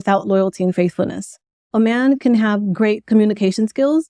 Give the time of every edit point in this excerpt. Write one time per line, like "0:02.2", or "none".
0:01.7